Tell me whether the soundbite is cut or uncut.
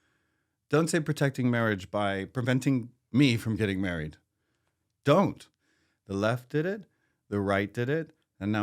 cut